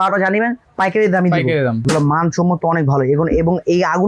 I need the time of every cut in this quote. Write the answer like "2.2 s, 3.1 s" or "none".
1.8 s